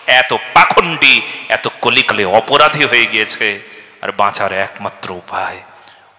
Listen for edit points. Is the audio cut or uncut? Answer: uncut